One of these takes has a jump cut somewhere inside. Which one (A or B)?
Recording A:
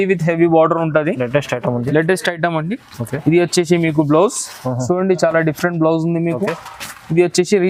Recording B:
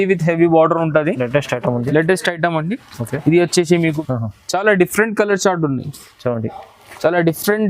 B